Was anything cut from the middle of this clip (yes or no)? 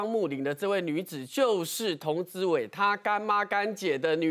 no